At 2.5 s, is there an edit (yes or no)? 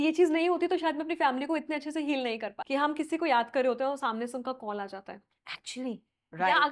yes